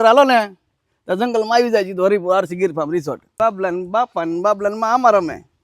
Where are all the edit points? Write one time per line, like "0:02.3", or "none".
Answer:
0:03.3

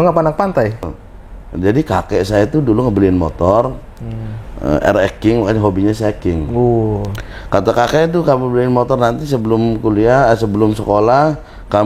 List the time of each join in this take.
0:00.9

